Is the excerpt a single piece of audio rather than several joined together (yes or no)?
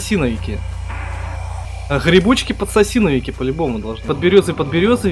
no